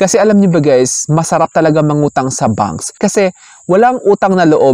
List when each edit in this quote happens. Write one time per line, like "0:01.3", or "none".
0:02.9